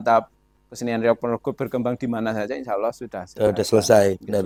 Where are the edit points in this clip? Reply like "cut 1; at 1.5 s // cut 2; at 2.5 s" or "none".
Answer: none